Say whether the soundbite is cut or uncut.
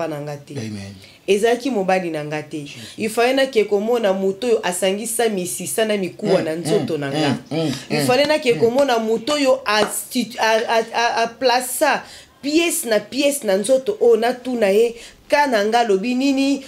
uncut